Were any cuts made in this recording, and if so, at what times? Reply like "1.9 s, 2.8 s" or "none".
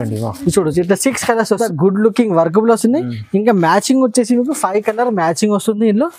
1.6 s